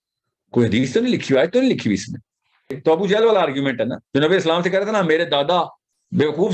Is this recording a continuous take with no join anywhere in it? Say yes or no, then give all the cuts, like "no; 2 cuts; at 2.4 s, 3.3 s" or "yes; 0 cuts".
no; 1 cut; at 2.8 s